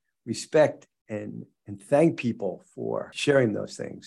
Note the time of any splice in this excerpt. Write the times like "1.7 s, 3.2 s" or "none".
3.1 s